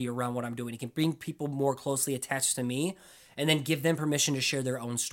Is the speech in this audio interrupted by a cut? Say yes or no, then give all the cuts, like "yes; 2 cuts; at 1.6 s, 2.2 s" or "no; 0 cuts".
no; 0 cuts